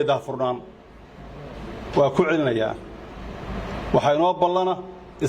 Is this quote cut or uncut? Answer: uncut